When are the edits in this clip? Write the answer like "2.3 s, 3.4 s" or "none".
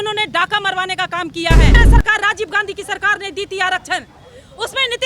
1.8 s